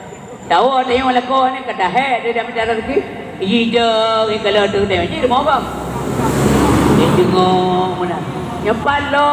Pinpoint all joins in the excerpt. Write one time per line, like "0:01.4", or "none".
none